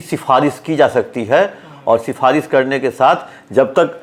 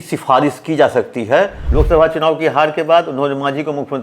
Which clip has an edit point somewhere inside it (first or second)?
second